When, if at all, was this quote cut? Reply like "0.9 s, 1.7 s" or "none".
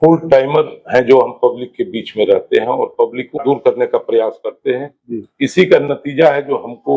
3.4 s